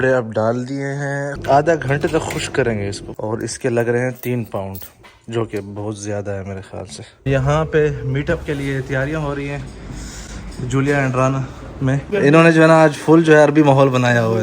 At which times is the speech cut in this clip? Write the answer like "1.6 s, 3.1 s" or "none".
1.3 s, 3.1 s, 7.3 s, 12.0 s

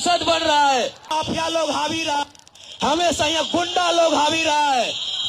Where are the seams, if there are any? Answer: 1.1 s

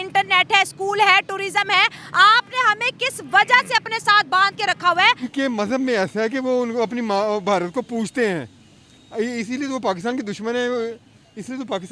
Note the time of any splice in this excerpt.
5.3 s

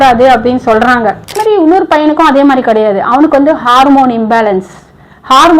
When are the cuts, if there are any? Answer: 1.3 s

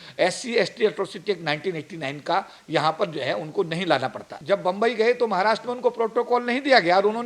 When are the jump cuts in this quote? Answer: 4.3 s

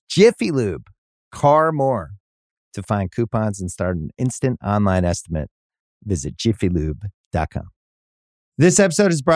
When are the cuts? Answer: 7.8 s

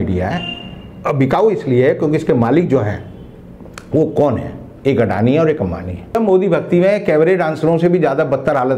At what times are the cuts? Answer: 6.2 s

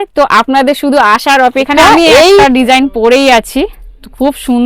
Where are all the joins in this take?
2.4 s

